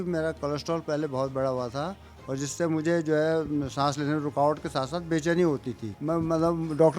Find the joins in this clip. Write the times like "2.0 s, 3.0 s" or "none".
5.9 s

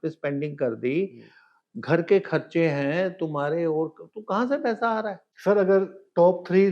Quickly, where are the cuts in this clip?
5.3 s

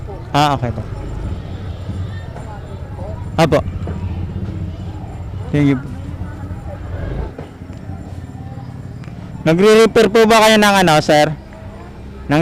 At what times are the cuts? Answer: 7.3 s

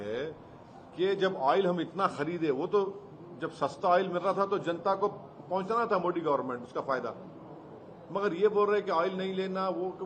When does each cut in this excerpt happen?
none

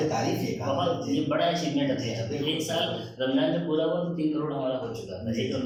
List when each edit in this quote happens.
none

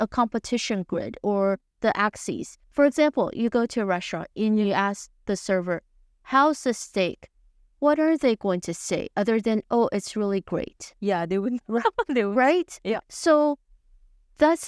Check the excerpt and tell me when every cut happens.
2.5 s

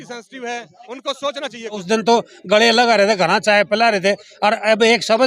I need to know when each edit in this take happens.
1.8 s

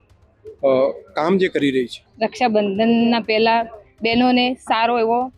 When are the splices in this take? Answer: 2.0 s

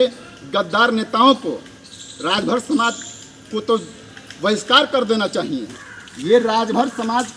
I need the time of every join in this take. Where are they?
5.8 s

